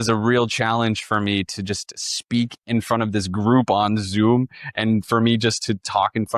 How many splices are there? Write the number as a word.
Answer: zero